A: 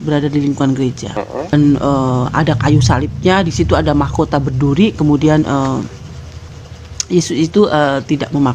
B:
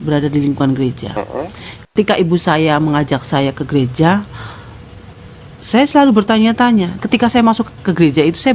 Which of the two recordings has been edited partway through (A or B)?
A